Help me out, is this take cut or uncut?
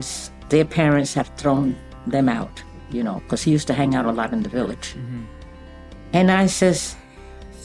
uncut